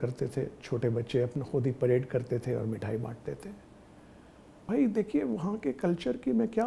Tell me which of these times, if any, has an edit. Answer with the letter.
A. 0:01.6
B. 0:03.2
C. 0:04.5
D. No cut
C